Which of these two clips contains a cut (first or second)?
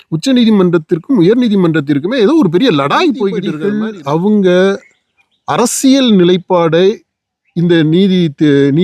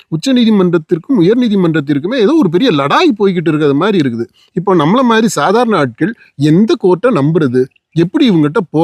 first